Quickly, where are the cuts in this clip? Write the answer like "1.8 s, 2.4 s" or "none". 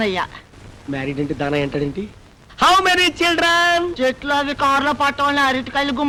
none